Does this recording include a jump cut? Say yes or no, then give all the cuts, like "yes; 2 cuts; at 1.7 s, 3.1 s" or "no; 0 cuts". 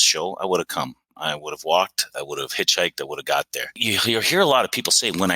yes; 1 cut; at 3.7 s